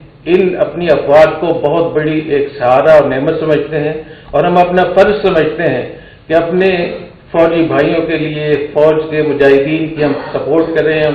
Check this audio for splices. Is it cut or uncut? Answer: uncut